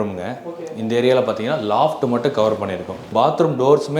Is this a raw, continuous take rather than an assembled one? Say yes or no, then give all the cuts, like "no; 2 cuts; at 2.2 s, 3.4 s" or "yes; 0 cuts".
no; 1 cut; at 3.1 s